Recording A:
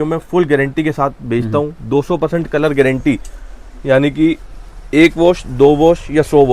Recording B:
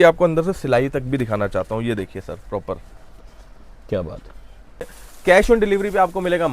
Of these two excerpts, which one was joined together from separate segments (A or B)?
B